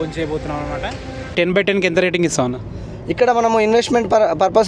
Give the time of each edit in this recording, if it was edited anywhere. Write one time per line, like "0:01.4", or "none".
0:01.3